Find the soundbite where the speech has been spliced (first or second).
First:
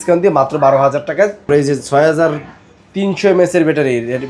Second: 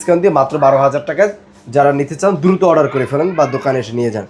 first